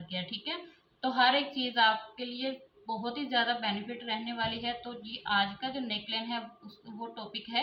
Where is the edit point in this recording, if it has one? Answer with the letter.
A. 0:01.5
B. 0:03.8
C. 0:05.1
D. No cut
D